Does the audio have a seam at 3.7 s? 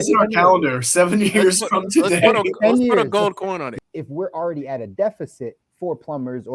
yes; 1 cut; at 3.7 s

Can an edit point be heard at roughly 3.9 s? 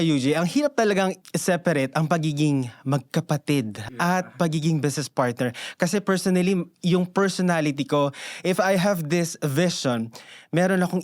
yes; 2 cuts; at 1.2 s, 3.9 s

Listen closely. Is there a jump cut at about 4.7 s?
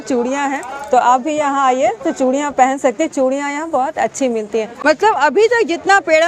yes; 1 cut; at 4.7 s

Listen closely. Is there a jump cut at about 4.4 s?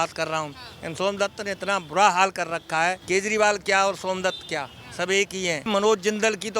no; 2 cuts; at 3.0 s, 5.7 s

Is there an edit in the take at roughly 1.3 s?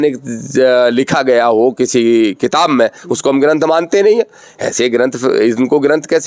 no; 0 cuts

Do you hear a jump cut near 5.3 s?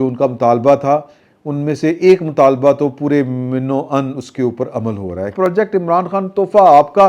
yes; 1 cut; at 5.3 s

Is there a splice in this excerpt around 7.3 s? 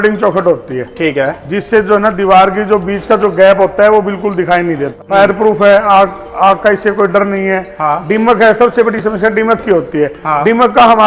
no; 1 cut; at 5.0 s

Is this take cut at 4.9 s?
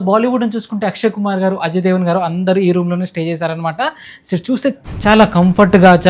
yes; 1 cut; at 4.9 s

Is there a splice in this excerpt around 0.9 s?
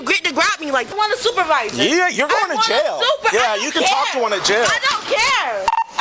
yes; 1 cut; at 0.9 s

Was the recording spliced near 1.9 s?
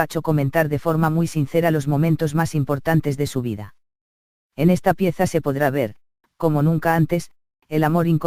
no; 0 cuts

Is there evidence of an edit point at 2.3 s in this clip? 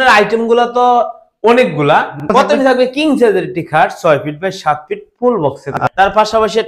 yes; 2 cuts; at 2.3 s, 5.8 s

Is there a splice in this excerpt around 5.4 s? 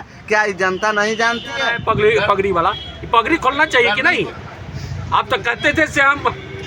no; 1 cut; at 1.7 s

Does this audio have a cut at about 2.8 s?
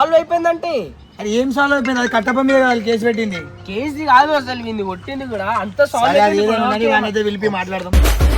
no; 0 cuts

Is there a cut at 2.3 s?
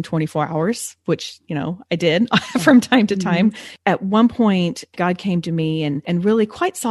no; 3 cuts; at 3.7 s, 4.9 s, 6.0 s

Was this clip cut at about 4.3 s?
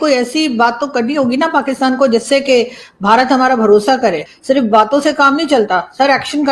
yes; 1 cut; at 4.3 s

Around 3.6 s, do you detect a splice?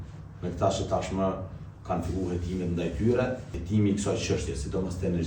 yes; 1 cut; at 3.6 s

